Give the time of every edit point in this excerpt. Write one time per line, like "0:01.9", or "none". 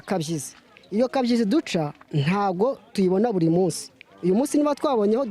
none